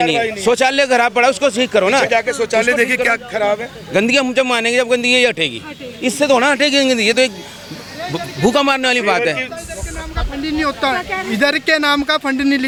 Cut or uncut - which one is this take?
uncut